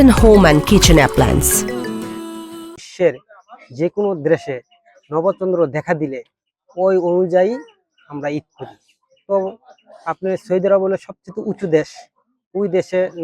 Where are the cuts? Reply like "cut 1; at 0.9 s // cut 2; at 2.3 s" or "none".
cut 1; at 2.8 s